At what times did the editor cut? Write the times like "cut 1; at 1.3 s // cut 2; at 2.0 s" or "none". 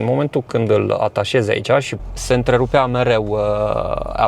cut 1; at 2.0 s